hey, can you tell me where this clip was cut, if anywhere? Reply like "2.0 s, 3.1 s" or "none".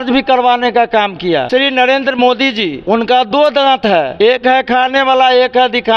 1.5 s, 2.8 s, 4.1 s